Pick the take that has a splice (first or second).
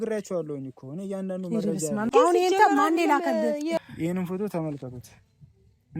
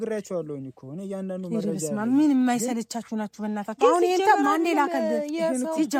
first